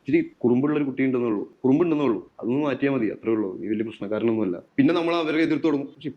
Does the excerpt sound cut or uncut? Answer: cut